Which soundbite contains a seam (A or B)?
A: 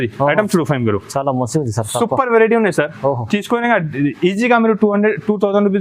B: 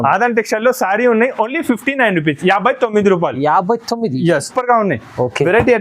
B